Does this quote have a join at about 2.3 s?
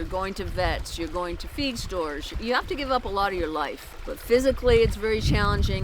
yes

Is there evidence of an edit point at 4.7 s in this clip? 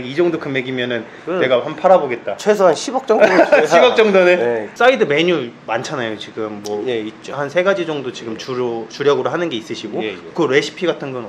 yes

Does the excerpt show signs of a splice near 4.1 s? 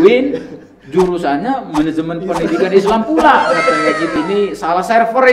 yes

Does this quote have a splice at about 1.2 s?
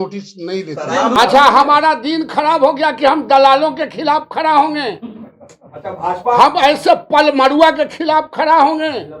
yes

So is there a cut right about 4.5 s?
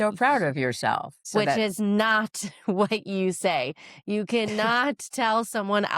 no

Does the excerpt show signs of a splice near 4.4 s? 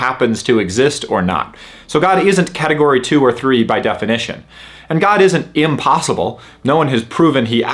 no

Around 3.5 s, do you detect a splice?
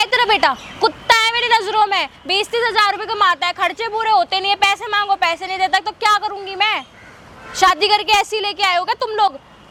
no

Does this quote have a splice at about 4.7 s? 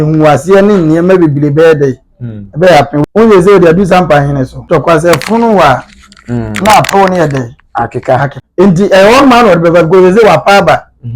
yes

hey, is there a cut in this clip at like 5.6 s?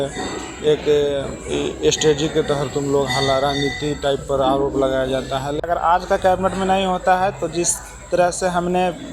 yes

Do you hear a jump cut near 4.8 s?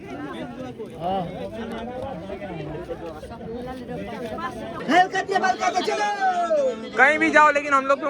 yes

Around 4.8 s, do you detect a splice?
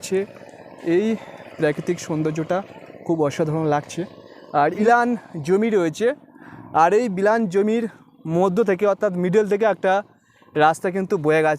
yes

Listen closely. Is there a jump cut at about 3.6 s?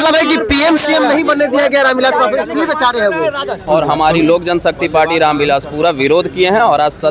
yes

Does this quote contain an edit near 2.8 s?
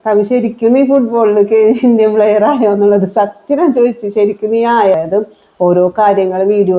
no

